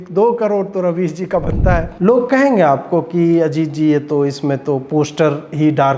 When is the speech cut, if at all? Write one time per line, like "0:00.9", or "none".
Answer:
0:01.9